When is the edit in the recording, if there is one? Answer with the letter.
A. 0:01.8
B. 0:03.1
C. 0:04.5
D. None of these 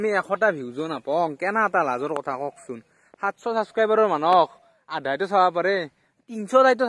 D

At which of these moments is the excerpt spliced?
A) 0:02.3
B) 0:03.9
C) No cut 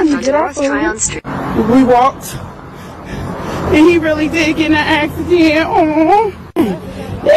B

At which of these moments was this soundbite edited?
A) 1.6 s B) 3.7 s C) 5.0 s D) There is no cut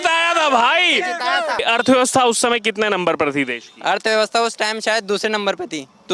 A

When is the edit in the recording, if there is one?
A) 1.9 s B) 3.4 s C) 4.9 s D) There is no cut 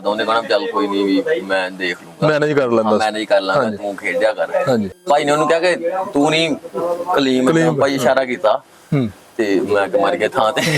C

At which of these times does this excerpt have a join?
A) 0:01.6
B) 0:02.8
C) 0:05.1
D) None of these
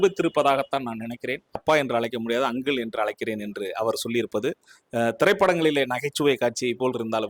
A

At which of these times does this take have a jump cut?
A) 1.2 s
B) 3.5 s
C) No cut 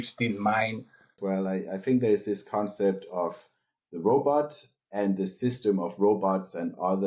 A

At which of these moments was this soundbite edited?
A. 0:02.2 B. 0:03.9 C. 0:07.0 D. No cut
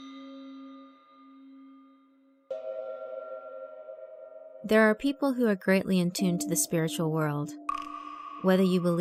D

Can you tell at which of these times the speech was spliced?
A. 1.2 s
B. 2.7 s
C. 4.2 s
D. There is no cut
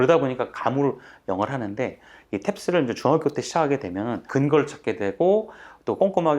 C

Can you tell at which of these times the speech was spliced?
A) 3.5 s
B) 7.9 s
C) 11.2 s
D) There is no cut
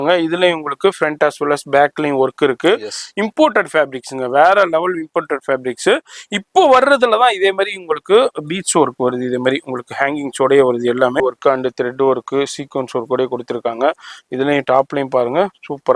C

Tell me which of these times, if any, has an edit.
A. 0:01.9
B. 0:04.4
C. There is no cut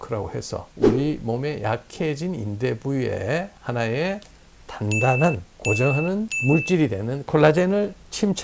C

